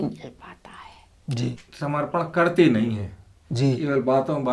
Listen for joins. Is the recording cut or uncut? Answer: cut